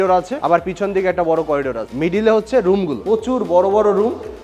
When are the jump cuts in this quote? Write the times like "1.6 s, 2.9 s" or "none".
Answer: 2.9 s